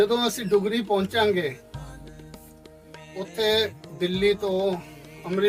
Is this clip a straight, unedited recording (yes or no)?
yes